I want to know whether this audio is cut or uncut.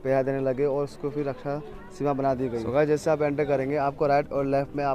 cut